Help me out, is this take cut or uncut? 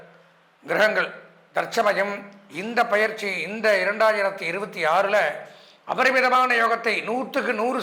uncut